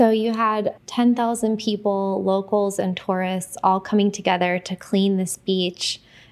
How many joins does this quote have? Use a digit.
0